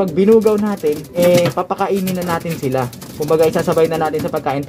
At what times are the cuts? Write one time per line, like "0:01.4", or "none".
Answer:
0:01.1